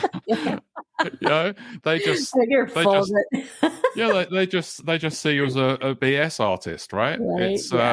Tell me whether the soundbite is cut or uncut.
cut